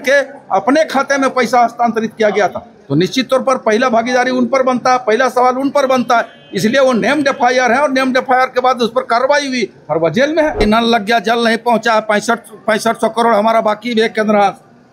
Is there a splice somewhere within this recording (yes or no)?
yes